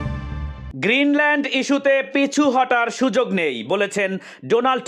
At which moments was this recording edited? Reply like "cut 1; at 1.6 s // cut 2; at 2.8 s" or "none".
none

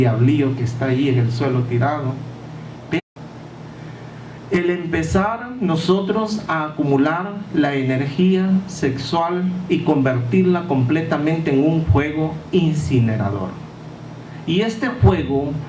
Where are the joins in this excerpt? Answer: none

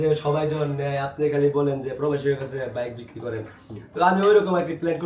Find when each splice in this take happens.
none

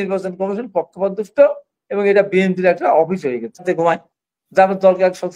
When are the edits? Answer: cut 1; at 3.6 s

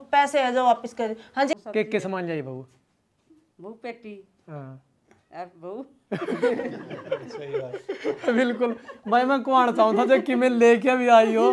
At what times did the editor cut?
cut 1; at 1.6 s

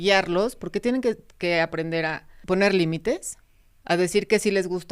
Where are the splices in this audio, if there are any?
cut 1; at 2.3 s

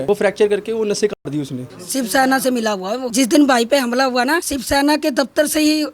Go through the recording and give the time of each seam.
cut 1; at 1.6 s

